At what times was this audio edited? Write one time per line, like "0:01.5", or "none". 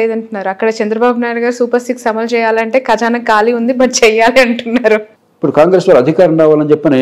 0:05.2